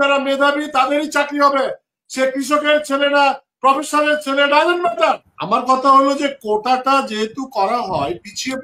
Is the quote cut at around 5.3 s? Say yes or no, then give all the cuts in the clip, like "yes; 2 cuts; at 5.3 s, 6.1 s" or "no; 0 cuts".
yes; 1 cut; at 5.3 s